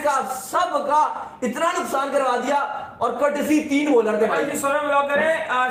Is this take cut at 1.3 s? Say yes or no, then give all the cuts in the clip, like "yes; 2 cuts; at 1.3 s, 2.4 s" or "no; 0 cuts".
no; 0 cuts